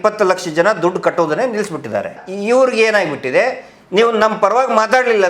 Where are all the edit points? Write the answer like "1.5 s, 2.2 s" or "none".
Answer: 2.2 s